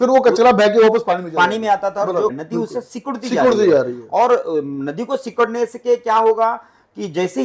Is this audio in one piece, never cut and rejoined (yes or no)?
no